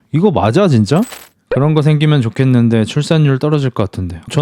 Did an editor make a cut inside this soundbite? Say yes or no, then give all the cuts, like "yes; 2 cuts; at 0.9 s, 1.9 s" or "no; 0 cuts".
yes; 1 cut; at 1.1 s